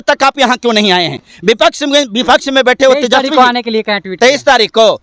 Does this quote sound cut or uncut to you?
uncut